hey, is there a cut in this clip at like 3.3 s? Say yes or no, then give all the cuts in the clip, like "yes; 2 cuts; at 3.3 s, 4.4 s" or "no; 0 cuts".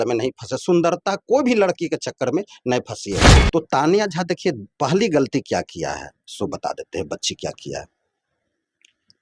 yes; 1 cut; at 3.3 s